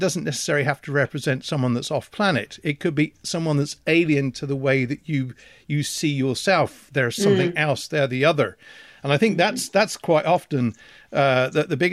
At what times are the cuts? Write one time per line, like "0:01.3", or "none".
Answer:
none